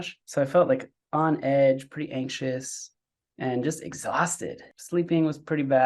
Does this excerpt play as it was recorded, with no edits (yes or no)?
no